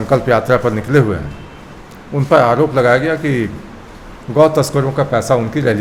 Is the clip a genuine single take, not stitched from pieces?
yes; 0 cuts

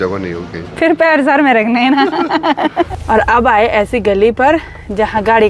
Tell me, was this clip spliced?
yes; 1 cut; at 2.9 s

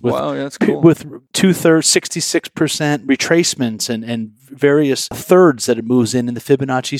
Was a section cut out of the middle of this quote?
yes; 2 cuts; at 1.1 s, 5.2 s

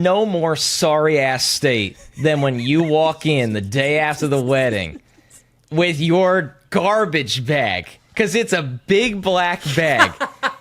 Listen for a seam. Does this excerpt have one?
no; 0 cuts

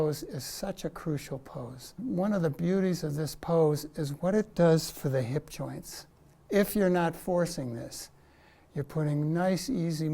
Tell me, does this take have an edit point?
yes; 1 cut; at 2.0 s

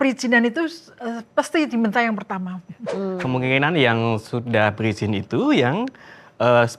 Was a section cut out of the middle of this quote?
yes; 1 cut; at 3.2 s

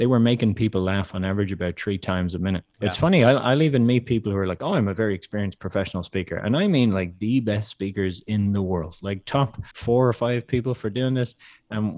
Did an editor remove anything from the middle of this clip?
yes; 2 cuts; at 2.7 s, 9.7 s

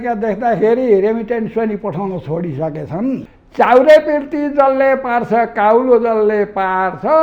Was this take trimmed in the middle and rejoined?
yes; 1 cut; at 3.2 s

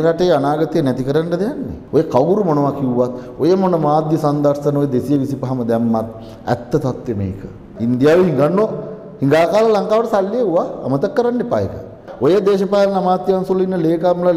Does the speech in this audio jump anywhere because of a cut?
yes; 3 cuts; at 1.7 s, 7.6 s, 12.0 s

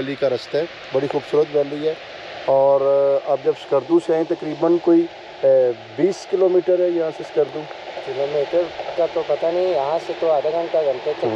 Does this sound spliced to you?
no; 0 cuts

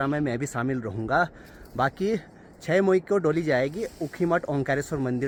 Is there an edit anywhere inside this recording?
no; 0 cuts

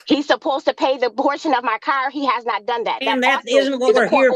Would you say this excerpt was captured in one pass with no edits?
yes; 0 cuts

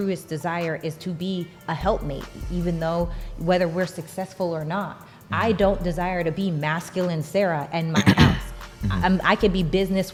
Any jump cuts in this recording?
no; 0 cuts

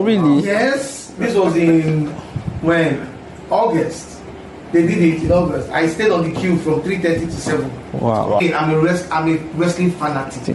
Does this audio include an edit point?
yes; 1 cut; at 8.4 s

